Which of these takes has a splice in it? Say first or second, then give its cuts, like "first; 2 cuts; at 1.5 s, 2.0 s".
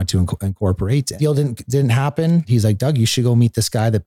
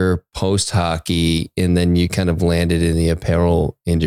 first; 2 cuts; at 1.1 s, 2.5 s